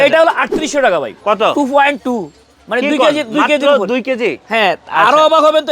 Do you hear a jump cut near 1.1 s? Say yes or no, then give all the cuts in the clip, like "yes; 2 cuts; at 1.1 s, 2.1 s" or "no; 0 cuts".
yes; 1 cut; at 1.1 s